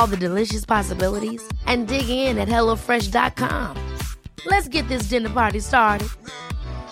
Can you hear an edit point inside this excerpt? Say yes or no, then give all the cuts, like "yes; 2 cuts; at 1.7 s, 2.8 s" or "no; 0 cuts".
no; 0 cuts